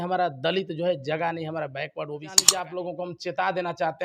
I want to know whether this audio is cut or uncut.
cut